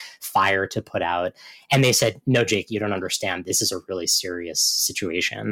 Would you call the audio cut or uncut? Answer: cut